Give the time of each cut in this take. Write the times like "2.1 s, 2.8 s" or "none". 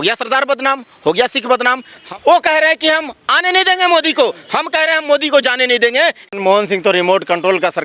2.0 s, 6.3 s